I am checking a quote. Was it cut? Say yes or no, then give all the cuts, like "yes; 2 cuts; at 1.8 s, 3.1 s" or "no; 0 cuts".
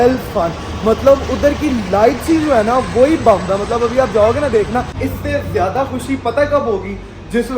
yes; 1 cut; at 4.9 s